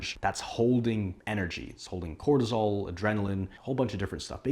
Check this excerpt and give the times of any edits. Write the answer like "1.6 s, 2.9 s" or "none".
3.5 s